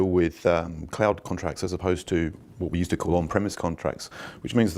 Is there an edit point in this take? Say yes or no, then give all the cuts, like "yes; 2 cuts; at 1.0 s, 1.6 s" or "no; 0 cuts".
yes; 1 cut; at 3.6 s